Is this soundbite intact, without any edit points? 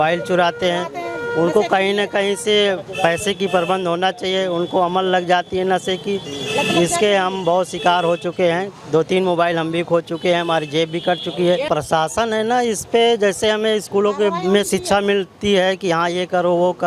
yes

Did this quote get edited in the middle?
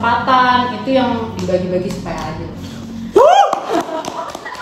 no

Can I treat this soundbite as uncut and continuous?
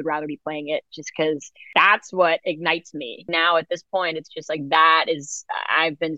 no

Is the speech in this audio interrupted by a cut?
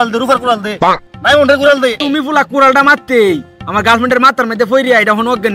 yes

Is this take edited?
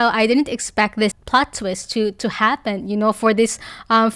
yes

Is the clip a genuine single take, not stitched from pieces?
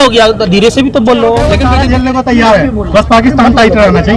no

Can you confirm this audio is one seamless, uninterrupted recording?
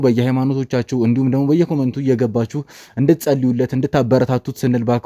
yes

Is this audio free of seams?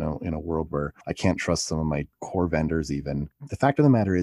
no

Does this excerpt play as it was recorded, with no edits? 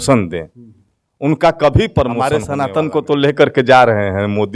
no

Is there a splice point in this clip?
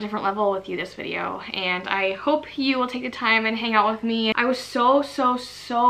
yes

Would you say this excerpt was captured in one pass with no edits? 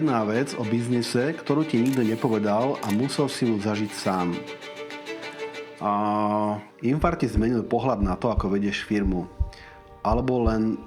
no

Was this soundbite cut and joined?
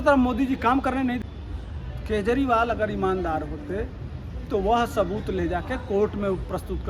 yes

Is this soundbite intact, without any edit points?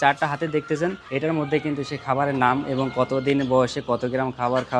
no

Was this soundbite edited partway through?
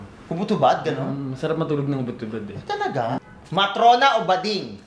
yes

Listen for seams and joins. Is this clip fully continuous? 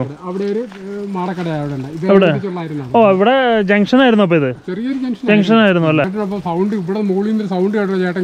no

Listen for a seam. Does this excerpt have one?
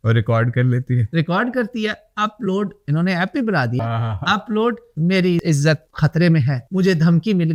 no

